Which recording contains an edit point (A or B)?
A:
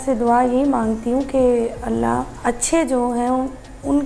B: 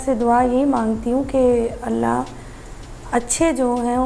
A